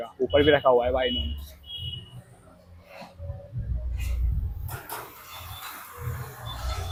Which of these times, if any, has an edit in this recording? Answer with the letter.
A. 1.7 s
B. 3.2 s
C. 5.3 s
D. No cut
D